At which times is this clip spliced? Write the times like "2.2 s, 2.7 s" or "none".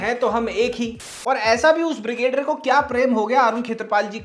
1.0 s

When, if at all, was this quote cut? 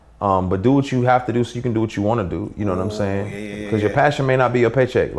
none

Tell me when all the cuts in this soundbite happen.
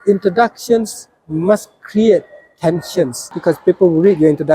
3.3 s

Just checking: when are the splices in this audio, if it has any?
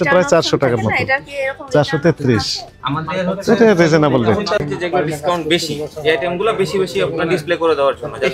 4.6 s

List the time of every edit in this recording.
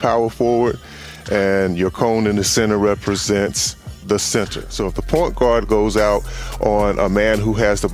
4.6 s

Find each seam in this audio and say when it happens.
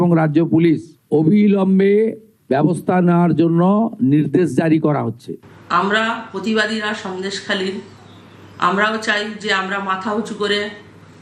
5.6 s

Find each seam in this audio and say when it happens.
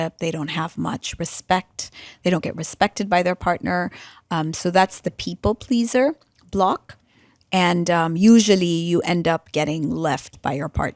none

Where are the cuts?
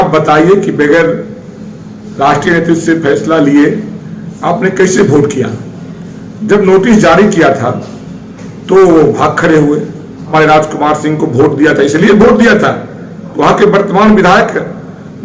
10.3 s

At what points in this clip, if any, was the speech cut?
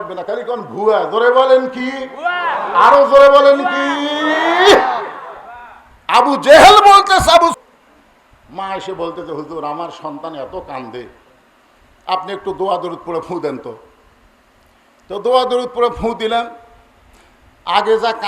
7.6 s

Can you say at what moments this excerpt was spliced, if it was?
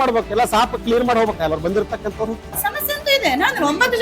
2.5 s

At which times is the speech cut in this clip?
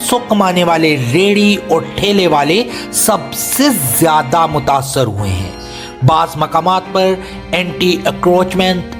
none

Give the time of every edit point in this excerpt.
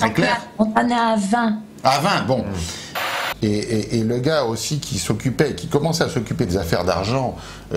3.0 s

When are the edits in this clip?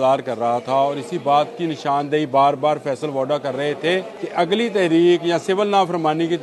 4.2 s

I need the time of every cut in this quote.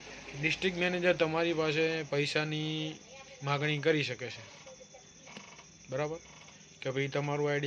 none

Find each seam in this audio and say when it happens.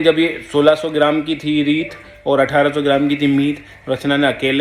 none

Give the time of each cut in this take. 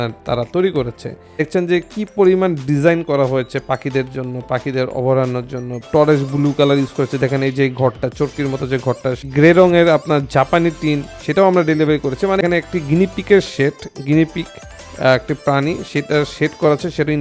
1.5 s, 5.9 s, 9.3 s, 12.4 s

